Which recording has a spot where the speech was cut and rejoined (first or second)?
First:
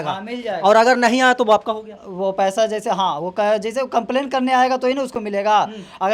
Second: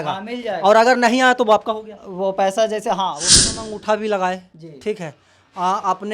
second